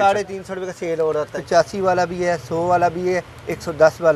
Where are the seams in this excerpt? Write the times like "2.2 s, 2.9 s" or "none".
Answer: 1.4 s